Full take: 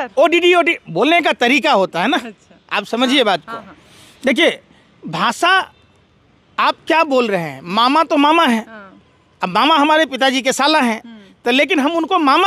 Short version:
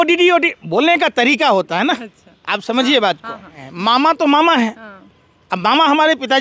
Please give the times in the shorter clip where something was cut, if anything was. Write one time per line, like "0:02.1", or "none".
0:03.7